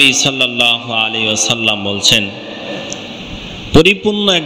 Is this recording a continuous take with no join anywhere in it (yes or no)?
yes